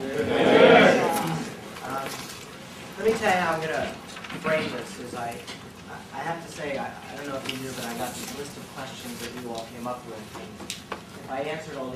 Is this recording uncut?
no; 1 cut; at 5.4 s

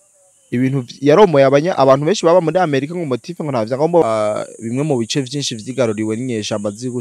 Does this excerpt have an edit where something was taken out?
yes; 1 cut; at 4.0 s

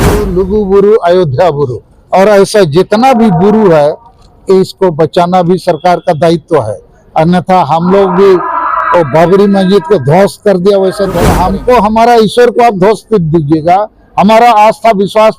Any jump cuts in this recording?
yes; 1 cut; at 11.3 s

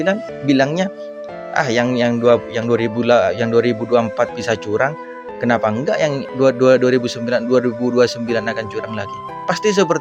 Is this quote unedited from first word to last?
yes; 0 cuts

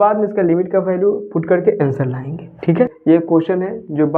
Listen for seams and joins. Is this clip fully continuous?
no; 1 cut; at 3.0 s

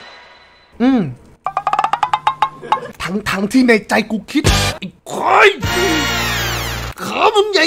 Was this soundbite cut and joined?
yes; 1 cut; at 2.9 s

